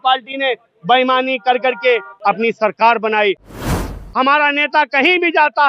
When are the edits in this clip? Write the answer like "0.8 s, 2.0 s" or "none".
2.1 s, 3.6 s